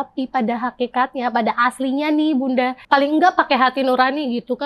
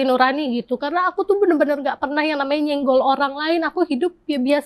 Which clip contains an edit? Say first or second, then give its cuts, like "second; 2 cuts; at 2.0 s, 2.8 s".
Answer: first; 1 cut; at 2.8 s